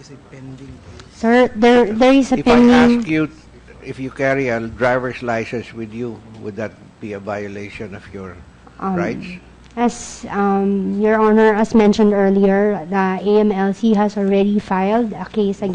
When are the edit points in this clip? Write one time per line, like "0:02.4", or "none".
0:10.1